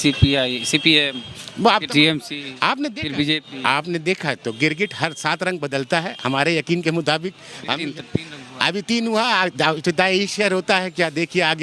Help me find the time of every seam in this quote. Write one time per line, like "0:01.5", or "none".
none